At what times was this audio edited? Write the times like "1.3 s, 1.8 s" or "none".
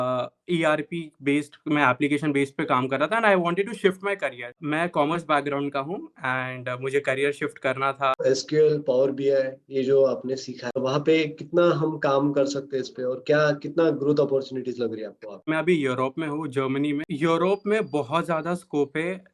4.6 s, 8.2 s, 10.8 s, 15.5 s, 17.1 s